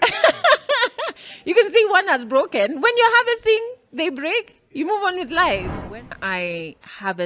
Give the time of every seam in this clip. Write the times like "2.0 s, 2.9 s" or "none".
6.1 s